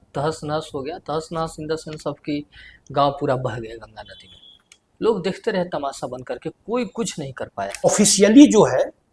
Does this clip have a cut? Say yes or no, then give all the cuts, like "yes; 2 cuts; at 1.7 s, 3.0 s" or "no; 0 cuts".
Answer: yes; 1 cut; at 7.8 s